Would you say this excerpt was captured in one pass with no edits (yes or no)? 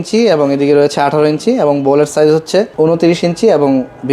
no